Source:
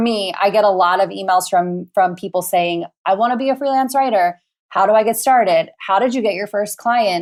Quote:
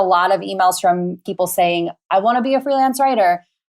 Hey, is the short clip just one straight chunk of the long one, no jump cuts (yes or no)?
no